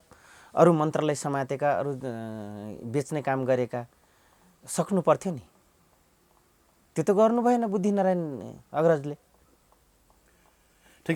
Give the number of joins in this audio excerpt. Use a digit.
0